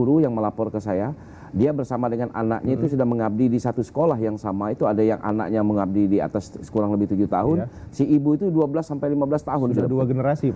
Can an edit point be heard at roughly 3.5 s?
no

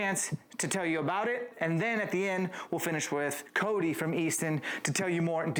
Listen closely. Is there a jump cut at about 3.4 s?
no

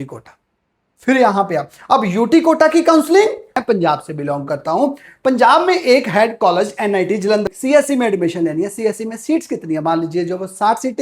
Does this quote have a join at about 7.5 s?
yes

